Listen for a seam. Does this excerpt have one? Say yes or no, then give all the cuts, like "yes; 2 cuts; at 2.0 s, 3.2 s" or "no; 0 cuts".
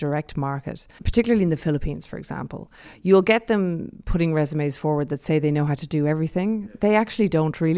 yes; 1 cut; at 1.0 s